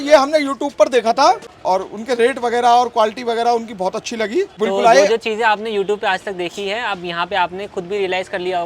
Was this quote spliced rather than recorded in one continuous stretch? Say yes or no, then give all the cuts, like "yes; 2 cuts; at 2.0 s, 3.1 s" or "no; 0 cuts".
yes; 2 cuts; at 1.5 s, 4.5 s